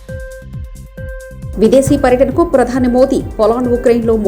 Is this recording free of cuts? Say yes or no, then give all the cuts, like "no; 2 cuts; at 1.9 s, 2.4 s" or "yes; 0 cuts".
no; 1 cut; at 1.2 s